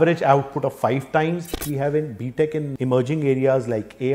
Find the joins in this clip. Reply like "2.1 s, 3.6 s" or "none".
1.6 s, 2.7 s